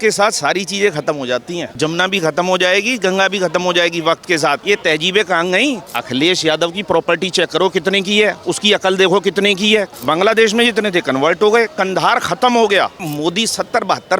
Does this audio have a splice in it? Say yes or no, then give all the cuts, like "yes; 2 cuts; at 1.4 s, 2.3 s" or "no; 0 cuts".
yes; 5 cuts; at 1.7 s, 4.6 s, 5.9 s, 9.9 s, 13.1 s